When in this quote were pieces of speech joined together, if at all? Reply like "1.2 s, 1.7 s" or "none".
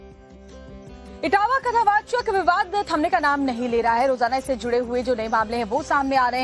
1.0 s